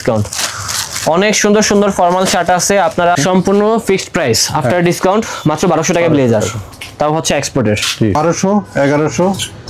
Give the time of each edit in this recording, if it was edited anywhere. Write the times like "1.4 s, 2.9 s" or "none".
3.1 s, 8.2 s